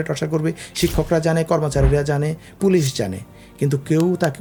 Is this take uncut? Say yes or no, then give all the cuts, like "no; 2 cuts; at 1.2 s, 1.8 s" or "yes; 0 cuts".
yes; 0 cuts